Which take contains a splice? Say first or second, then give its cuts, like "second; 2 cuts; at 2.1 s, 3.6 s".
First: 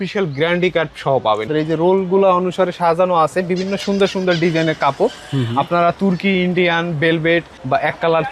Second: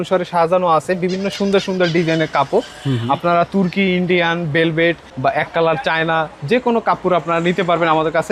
first; 1 cut; at 1.5 s